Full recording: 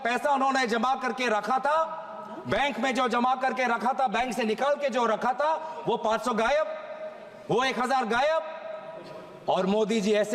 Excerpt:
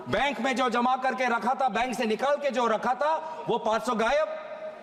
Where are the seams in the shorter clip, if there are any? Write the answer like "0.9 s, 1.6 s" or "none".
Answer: none